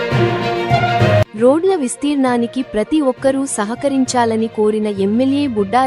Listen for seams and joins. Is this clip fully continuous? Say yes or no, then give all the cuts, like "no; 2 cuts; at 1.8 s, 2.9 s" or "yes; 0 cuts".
no; 1 cut; at 1.3 s